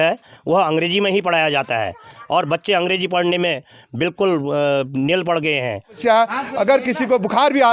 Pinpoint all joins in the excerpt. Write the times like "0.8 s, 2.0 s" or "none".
6.0 s